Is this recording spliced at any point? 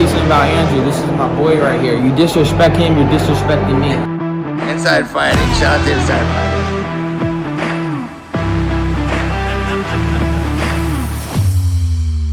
no; 0 cuts

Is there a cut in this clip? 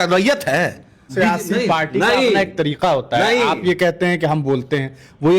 yes; 1 cut; at 1.1 s

